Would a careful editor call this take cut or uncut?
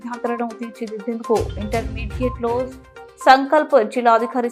uncut